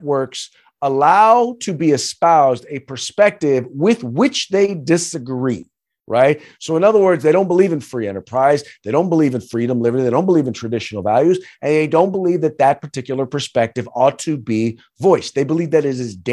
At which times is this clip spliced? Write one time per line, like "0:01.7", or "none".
none